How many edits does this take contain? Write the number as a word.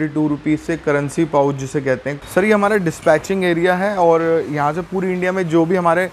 one